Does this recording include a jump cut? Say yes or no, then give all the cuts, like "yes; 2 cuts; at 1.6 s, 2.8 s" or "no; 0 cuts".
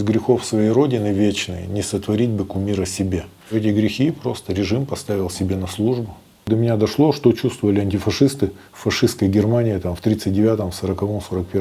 yes; 2 cuts; at 3.5 s, 6.5 s